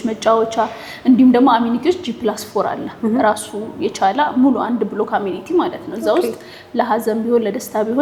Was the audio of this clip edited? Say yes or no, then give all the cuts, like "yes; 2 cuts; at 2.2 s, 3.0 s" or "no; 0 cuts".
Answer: no; 0 cuts